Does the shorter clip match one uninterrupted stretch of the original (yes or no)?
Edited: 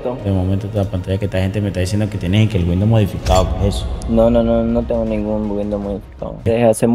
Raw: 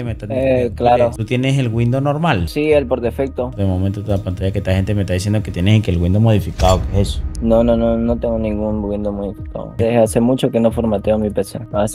yes